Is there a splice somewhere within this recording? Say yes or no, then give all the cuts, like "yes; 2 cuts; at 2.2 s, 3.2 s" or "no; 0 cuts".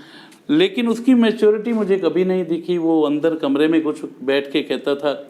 no; 0 cuts